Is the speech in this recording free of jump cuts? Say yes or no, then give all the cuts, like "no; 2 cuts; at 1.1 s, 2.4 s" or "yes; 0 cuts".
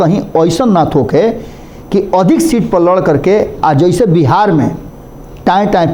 yes; 0 cuts